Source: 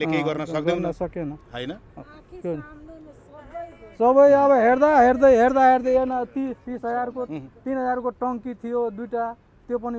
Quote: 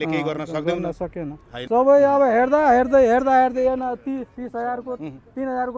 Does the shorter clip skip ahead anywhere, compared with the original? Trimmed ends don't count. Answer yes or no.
yes